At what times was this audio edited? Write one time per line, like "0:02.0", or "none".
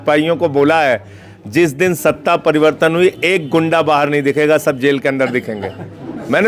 none